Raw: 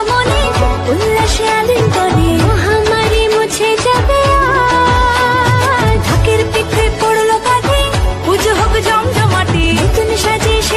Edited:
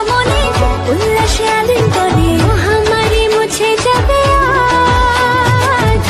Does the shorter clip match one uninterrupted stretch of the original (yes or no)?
yes